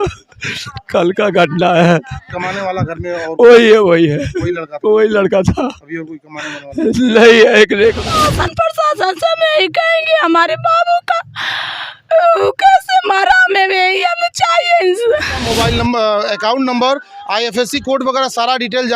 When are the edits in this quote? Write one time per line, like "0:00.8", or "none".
0:08.1
0:15.5